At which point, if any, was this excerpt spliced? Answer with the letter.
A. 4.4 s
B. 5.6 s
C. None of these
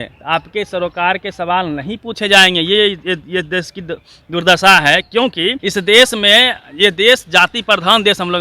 B